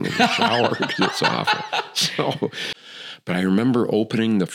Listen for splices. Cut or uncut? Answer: cut